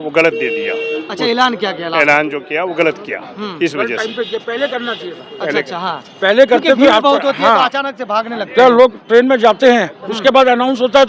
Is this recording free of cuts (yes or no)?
yes